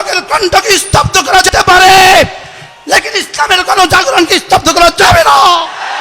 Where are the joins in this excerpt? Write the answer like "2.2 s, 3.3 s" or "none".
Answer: 1.5 s